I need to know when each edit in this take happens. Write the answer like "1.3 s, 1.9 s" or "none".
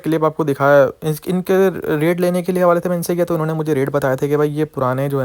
none